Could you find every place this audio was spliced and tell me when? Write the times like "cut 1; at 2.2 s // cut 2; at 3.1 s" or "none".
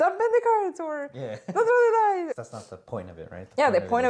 cut 1; at 2.3 s